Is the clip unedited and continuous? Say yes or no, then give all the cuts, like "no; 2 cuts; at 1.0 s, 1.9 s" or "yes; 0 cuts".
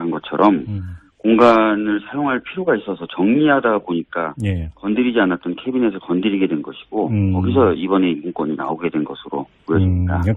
yes; 0 cuts